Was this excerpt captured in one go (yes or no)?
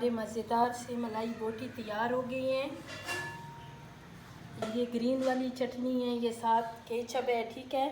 no